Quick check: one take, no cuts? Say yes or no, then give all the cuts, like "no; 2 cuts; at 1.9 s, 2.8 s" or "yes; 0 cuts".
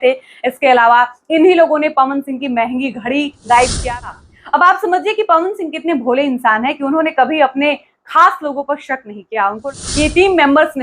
no; 2 cuts; at 3.9 s, 9.7 s